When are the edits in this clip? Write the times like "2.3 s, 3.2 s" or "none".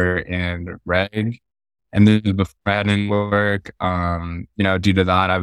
none